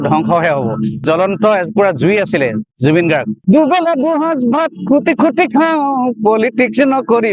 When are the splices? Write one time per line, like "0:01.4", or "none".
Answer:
0:01.0
0:03.3